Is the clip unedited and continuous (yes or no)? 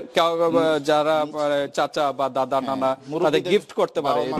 yes